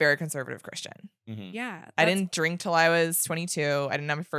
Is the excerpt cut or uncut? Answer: uncut